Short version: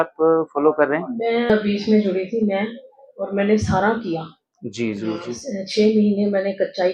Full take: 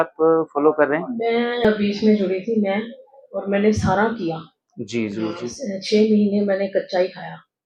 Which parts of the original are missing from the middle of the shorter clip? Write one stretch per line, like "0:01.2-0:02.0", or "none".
0:01.5-0:01.6